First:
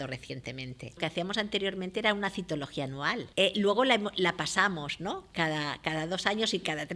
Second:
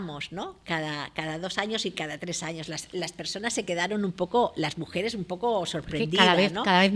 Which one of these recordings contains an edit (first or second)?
first